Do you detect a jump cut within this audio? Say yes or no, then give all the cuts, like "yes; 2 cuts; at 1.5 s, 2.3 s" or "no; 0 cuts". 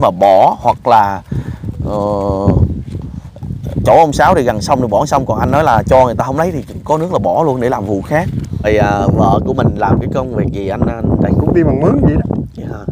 yes; 1 cut; at 8.5 s